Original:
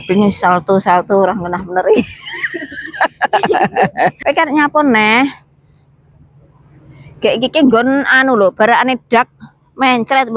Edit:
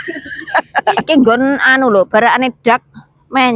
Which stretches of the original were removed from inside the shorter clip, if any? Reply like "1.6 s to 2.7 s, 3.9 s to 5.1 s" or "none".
3.5 s to 7.5 s